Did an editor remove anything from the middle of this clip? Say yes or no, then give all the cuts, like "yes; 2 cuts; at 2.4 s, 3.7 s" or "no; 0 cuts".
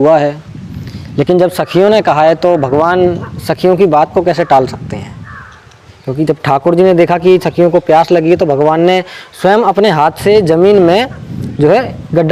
no; 0 cuts